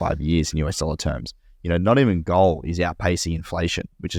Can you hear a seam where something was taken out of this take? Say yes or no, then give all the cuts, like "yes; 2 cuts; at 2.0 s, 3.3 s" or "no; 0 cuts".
no; 0 cuts